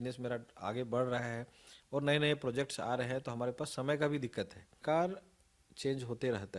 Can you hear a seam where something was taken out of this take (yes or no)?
yes